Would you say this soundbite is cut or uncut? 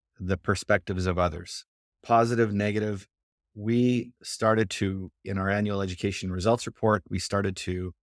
cut